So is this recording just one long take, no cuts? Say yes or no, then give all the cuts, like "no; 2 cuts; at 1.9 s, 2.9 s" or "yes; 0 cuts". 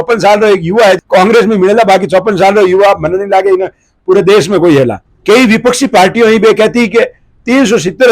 no; 1 cut; at 5.0 s